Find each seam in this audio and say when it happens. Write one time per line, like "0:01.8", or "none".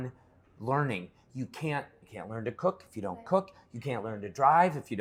none